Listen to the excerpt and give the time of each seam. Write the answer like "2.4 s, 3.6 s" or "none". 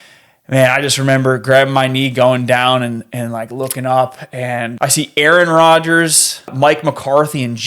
4.7 s, 6.5 s

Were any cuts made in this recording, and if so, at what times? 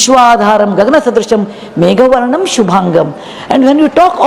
none

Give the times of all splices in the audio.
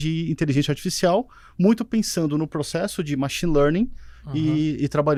none

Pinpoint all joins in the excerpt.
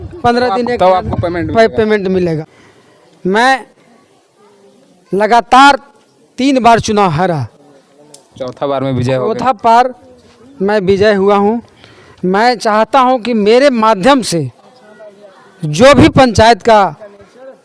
2.4 s

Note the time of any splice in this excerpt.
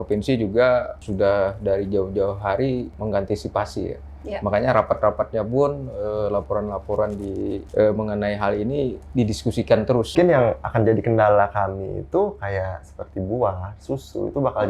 1.0 s, 2.9 s, 7.6 s, 10.1 s

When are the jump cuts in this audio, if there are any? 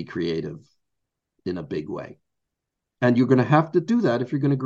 none

